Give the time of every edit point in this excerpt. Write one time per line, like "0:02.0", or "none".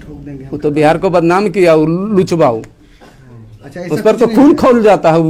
none